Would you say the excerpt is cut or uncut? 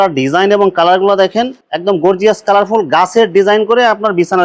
uncut